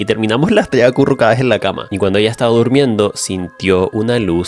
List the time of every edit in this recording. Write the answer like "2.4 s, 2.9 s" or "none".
1.8 s